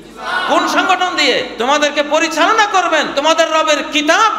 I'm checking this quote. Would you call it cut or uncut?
cut